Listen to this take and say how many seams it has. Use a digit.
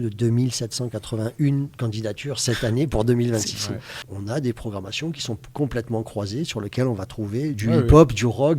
2